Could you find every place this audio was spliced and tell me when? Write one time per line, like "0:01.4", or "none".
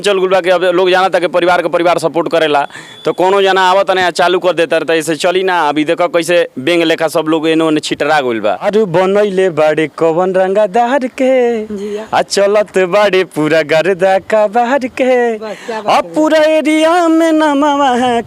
0:08.7